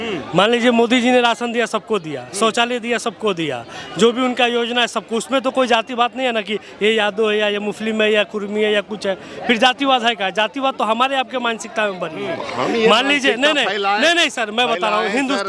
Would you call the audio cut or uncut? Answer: uncut